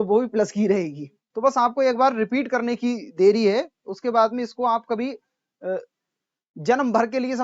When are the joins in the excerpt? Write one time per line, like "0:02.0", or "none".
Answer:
0:01.2